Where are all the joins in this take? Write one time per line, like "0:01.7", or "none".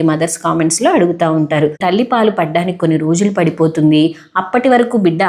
0:01.8